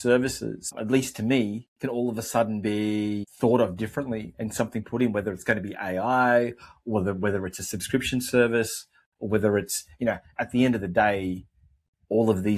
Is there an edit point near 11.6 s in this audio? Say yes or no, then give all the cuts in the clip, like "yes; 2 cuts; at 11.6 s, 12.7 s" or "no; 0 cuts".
no; 2 cuts; at 0.8 s, 3.3 s